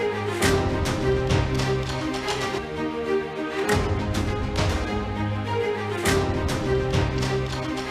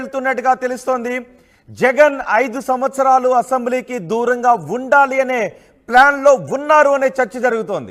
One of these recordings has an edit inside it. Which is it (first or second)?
first